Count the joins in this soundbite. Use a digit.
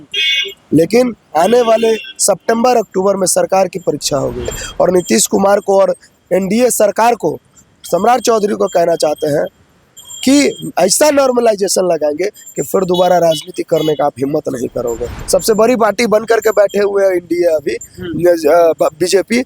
2